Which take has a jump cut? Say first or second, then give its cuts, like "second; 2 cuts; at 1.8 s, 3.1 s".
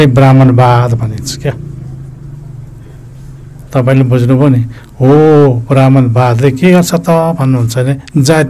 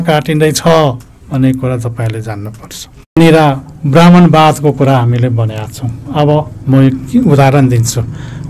second; 1 cut; at 3.2 s